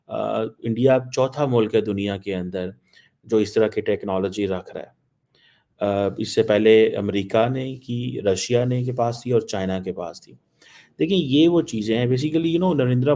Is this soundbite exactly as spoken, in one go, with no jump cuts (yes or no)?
yes